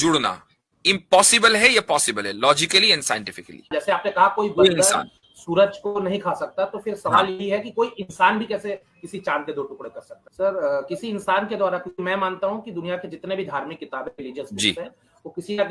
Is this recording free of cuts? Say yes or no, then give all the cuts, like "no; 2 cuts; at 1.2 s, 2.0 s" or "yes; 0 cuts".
no; 2 cuts; at 3.7 s, 10.1 s